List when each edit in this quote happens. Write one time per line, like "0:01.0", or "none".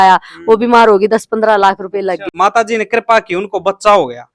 none